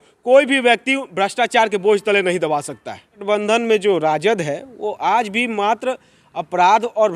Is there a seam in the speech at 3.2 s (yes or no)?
yes